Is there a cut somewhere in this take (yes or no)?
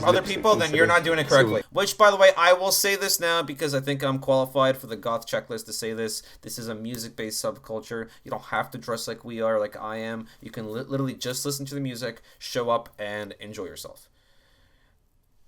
yes